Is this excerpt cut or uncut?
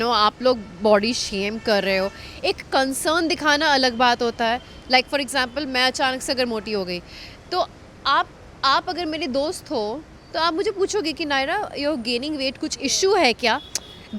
uncut